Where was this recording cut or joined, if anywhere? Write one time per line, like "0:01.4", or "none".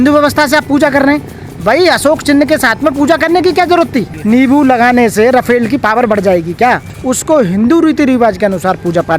0:04.1
0:06.9

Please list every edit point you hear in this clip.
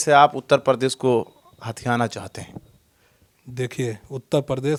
none

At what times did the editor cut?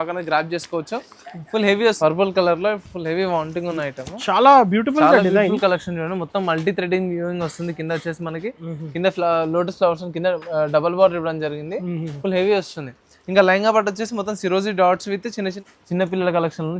0:02.0
0:15.6

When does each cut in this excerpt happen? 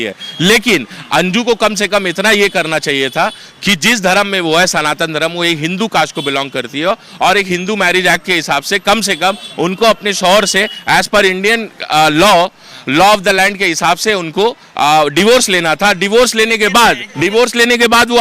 0:17.1

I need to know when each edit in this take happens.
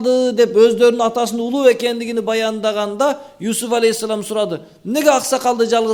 none

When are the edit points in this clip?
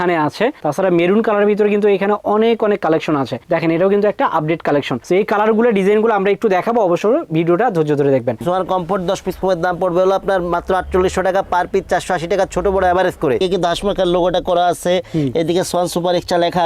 0:08.4
0:13.4

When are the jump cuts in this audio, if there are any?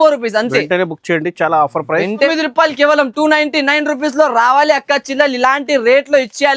0:02.3

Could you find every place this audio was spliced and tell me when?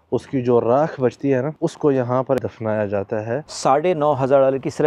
0:01.5
0:02.4
0:03.5

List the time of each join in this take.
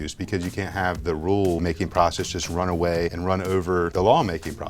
0:01.6
0:03.6

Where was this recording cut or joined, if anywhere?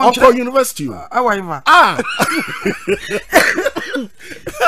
0:01.5

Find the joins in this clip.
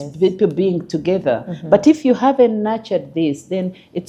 none

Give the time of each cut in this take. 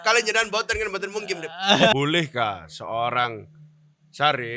0:01.9

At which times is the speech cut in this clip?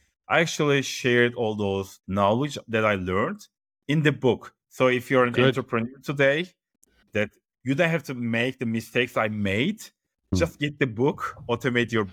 none

